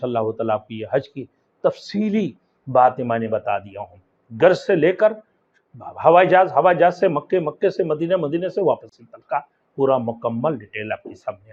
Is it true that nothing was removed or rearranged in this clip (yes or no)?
yes